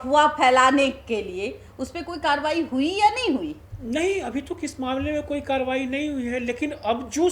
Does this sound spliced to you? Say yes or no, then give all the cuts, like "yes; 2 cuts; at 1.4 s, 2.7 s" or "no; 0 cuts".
no; 0 cuts